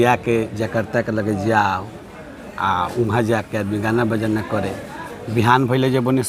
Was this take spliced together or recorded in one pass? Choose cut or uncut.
uncut